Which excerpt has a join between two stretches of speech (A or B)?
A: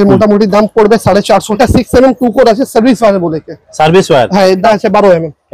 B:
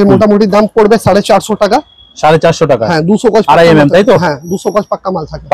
A